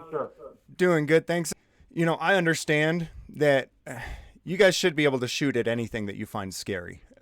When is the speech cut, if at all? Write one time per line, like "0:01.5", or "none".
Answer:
0:01.5